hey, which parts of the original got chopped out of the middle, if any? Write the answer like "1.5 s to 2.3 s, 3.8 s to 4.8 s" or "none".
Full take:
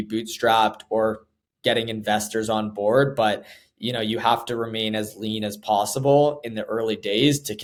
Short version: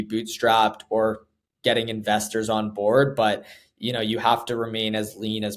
none